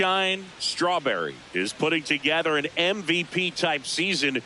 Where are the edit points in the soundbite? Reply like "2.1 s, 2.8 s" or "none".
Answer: 1.0 s